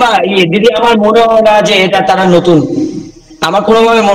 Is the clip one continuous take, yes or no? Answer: yes